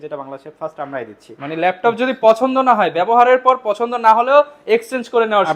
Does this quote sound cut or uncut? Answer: uncut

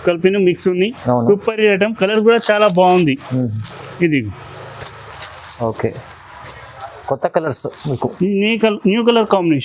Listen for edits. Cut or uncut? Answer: uncut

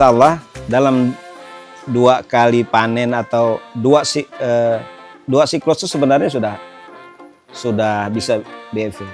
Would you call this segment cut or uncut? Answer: uncut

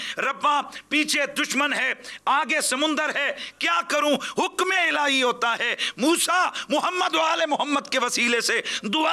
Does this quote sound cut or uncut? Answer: uncut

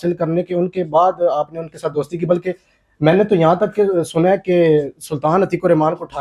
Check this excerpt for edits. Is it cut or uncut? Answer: uncut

